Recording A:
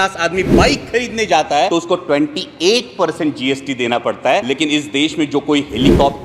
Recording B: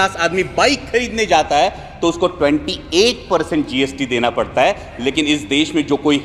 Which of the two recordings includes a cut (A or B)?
A